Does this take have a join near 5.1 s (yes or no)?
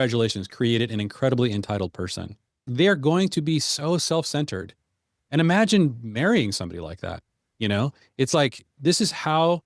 no